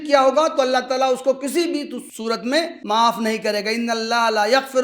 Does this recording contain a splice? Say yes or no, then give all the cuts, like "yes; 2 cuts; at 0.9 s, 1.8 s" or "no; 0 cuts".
yes; 1 cut; at 2.5 s